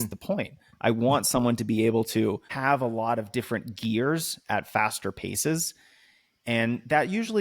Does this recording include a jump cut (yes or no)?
yes